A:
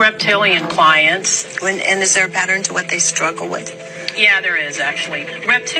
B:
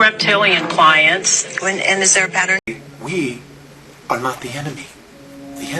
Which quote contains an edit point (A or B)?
B